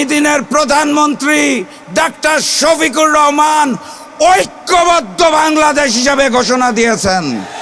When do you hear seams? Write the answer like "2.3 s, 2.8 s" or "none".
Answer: none

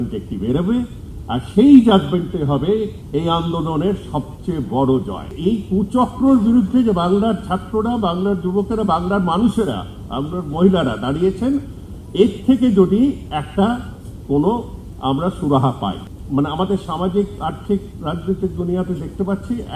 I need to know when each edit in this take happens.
5.3 s, 16.1 s

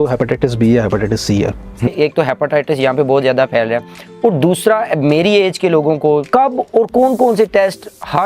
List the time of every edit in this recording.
1.9 s, 6.2 s

